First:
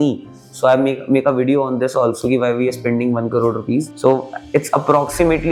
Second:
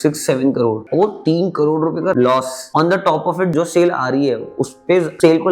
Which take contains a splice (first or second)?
second